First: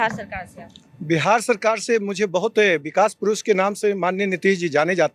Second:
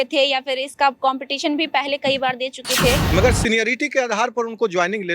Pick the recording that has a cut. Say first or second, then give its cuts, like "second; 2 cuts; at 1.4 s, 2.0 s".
second; 1 cut; at 3.0 s